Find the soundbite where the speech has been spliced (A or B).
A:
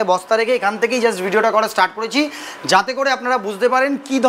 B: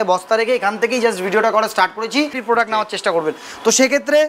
B